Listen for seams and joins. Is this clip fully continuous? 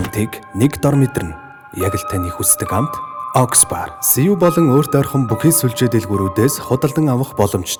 yes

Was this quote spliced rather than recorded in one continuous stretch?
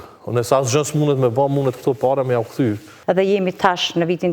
yes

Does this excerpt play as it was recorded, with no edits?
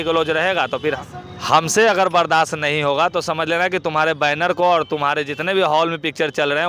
no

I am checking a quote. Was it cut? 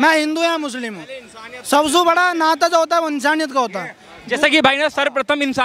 no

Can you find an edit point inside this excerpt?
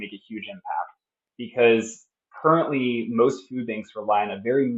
no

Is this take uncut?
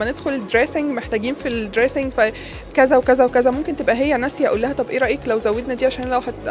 yes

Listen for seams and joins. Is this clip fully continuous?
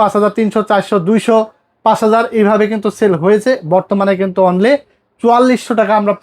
yes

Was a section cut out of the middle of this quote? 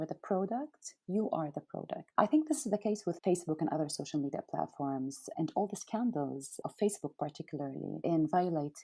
no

